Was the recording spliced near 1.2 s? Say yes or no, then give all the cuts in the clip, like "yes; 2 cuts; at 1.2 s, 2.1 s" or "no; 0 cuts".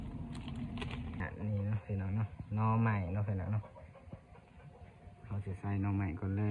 yes; 1 cut; at 1.2 s